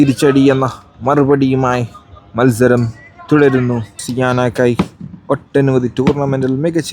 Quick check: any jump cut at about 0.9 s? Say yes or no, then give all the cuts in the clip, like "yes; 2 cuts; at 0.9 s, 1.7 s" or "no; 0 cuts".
no; 1 cut; at 4.0 s